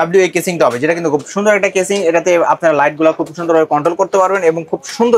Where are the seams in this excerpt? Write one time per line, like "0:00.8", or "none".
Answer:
none